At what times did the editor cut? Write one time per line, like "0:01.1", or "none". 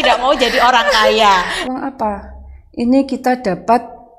0:01.6